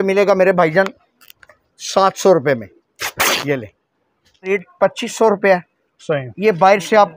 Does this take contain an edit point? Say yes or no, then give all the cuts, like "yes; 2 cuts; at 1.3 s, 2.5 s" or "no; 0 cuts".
yes; 1 cut; at 4.5 s